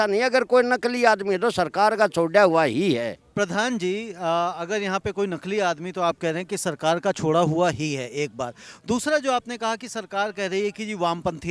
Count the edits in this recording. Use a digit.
0